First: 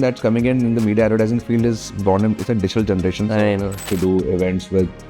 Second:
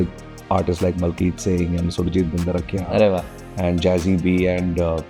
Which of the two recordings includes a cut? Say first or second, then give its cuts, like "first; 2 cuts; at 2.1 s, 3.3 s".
first; 1 cut; at 3.8 s